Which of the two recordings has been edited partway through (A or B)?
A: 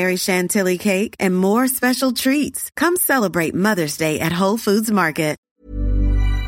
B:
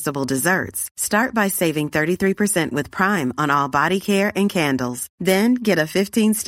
A